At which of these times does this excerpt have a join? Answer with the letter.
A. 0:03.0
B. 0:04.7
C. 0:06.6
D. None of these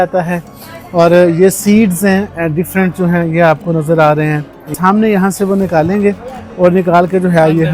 B